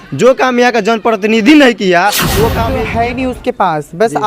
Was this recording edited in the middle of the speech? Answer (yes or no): yes